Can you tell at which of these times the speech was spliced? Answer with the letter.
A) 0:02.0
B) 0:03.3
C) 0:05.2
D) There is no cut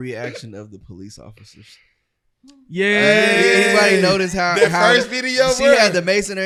D